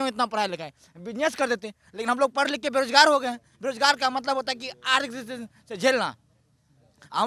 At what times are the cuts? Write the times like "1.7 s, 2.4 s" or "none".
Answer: none